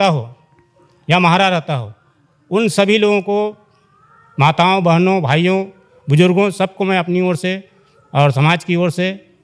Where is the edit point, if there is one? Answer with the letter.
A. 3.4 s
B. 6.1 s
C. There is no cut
C